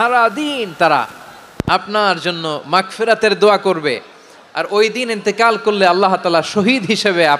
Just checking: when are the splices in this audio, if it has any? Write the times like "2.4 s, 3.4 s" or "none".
none

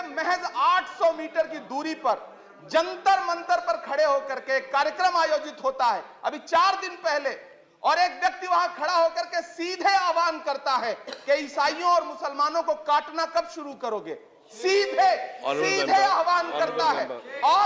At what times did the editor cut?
none

